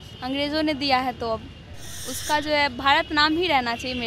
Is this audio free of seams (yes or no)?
yes